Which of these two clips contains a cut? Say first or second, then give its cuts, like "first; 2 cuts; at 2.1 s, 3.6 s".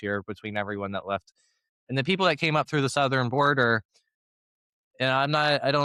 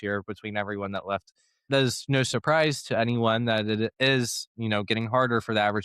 second; 1 cut; at 1.7 s